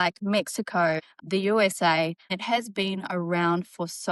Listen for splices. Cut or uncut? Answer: cut